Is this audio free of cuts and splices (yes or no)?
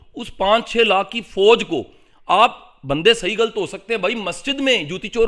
yes